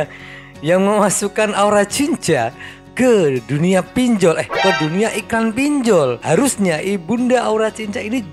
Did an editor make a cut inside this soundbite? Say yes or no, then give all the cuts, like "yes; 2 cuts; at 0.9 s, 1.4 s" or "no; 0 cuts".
yes; 1 cut; at 6.2 s